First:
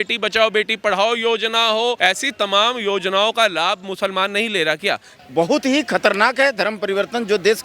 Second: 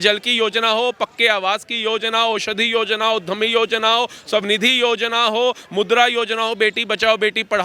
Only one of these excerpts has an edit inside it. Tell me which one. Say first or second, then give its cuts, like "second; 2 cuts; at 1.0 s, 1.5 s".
first; 2 cuts; at 2.0 s, 5.1 s